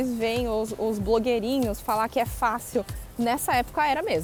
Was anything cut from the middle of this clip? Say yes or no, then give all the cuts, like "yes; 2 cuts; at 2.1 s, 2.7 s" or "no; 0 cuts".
no; 0 cuts